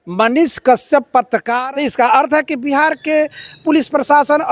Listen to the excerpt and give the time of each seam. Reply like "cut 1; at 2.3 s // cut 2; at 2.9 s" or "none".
cut 1; at 1.5 s